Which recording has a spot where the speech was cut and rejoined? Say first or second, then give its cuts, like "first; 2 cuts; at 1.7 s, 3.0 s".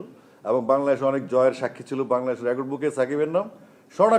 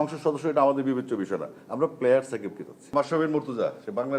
second; 1 cut; at 2.9 s